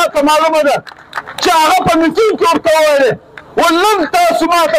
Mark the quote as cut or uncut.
uncut